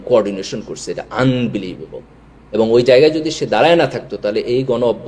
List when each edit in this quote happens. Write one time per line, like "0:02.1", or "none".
none